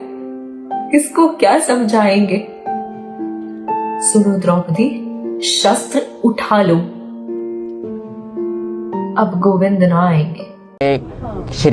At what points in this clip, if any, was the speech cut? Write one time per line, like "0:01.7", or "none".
0:10.8